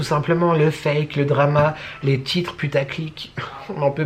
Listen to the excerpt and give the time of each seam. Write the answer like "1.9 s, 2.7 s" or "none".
none